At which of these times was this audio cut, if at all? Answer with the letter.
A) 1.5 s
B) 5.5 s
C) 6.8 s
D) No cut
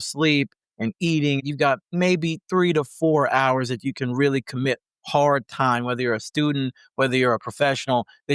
A